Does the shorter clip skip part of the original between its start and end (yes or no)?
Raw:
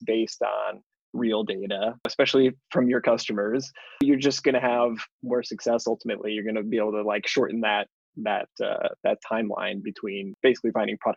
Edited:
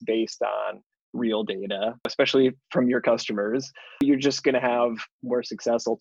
no